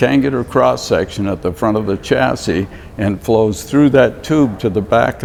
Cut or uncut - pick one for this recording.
uncut